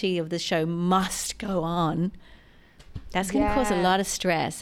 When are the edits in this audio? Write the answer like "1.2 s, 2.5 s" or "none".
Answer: none